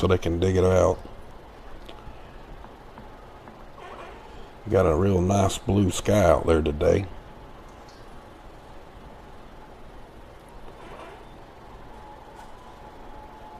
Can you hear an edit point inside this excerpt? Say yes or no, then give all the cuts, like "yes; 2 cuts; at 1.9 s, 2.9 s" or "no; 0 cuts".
no; 0 cuts